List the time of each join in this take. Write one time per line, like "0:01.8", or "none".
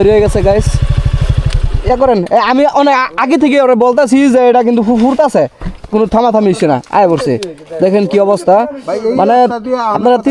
none